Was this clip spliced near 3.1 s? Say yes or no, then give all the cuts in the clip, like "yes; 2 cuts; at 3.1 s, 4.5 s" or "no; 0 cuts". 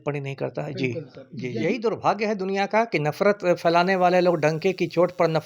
no; 1 cut; at 1.5 s